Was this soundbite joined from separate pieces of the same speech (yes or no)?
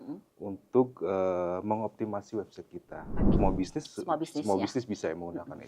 yes